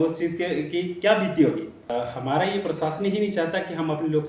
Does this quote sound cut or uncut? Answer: cut